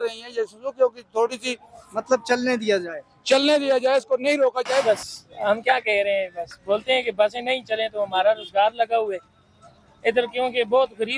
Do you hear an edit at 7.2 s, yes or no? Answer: no